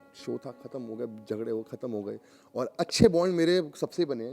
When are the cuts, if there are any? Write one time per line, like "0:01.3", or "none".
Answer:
0:02.3

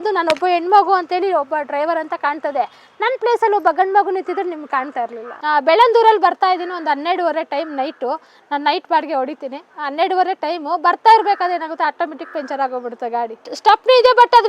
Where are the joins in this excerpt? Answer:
0:05.3
0:13.5

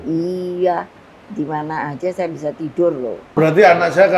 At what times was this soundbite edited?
0:03.3

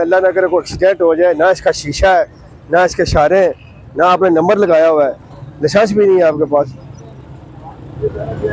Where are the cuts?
none

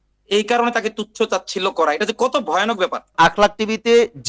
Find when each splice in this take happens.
0:03.1

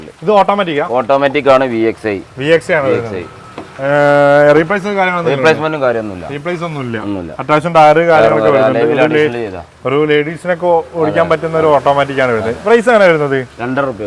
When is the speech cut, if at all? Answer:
none

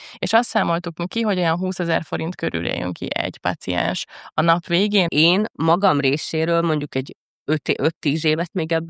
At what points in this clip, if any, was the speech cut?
0:05.1

